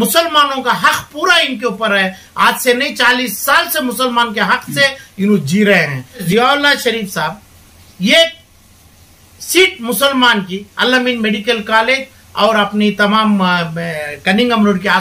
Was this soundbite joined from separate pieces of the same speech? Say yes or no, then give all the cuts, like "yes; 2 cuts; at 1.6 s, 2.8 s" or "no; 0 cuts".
yes; 1 cut; at 6.2 s